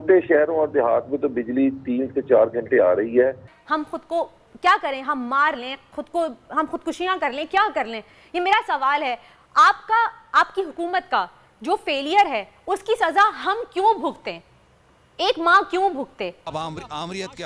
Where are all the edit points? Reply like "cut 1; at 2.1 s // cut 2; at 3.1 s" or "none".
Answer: cut 1; at 3.5 s // cut 2; at 16.4 s